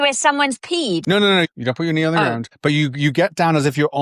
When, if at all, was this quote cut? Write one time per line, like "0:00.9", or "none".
0:01.2
0:02.5